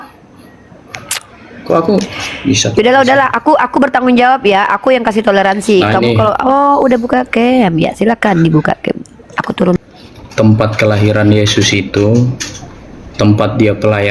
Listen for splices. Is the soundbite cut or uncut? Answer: cut